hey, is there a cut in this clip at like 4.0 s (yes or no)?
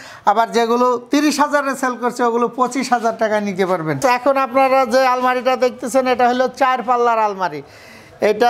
yes